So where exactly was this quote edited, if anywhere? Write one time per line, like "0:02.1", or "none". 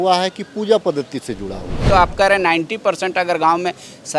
0:01.8